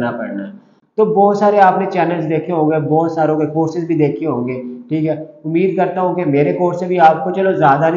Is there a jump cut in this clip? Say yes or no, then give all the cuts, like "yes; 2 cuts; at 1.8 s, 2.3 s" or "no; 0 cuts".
no; 0 cuts